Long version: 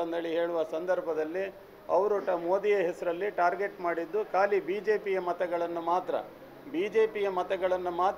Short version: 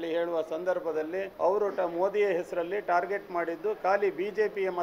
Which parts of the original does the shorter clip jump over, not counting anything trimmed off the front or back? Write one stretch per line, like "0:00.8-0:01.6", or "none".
0:01.5-0:01.8